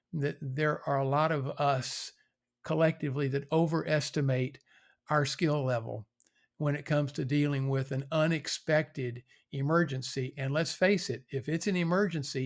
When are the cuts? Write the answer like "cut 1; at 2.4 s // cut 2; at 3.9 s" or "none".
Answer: none